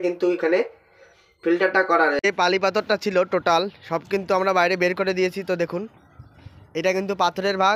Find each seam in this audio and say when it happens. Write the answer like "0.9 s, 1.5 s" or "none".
2.2 s